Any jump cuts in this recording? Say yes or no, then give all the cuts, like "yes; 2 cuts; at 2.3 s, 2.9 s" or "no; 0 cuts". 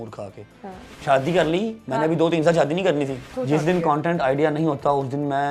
yes; 2 cuts; at 0.9 s, 3.4 s